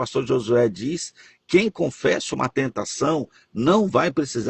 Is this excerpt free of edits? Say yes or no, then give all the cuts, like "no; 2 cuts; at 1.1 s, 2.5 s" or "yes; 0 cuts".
yes; 0 cuts